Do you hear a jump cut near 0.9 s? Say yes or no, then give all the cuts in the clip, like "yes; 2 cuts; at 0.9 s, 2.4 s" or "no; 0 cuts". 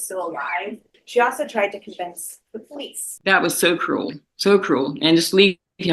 yes; 2 cuts; at 0.9 s, 3.0 s